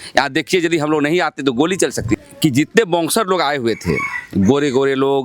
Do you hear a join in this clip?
yes; 1 cut; at 2.2 s

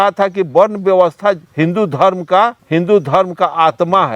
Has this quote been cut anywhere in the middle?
no; 0 cuts

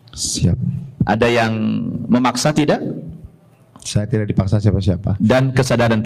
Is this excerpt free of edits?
yes; 0 cuts

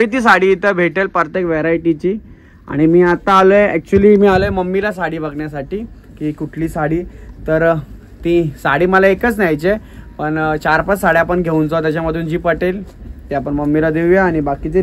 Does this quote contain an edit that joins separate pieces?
no; 0 cuts

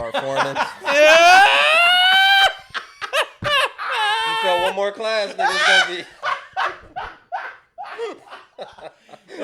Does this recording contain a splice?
no; 0 cuts

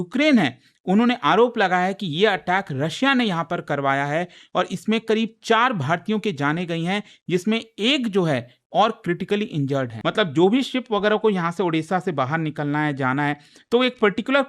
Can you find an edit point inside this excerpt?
no; 0 cuts

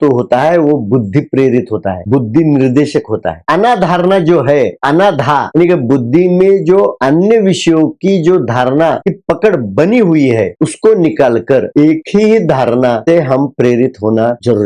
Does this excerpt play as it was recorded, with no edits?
yes; 0 cuts

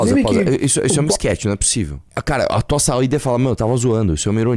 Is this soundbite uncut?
no; 1 cut; at 2.0 s

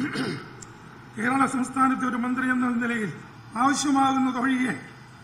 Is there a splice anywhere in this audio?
no; 0 cuts

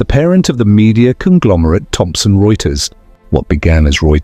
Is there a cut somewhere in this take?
no; 0 cuts

